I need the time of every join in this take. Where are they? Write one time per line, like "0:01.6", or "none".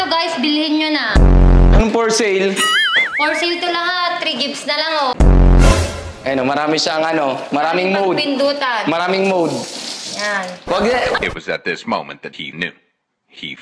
0:05.7